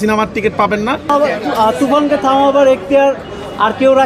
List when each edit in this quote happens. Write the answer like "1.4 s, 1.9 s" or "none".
1.0 s